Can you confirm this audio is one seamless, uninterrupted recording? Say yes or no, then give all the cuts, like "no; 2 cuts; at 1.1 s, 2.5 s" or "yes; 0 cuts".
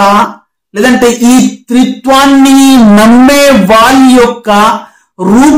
yes; 0 cuts